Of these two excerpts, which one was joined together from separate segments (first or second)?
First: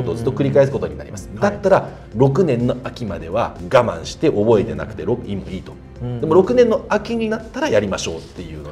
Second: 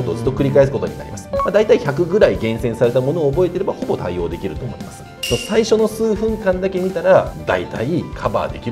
second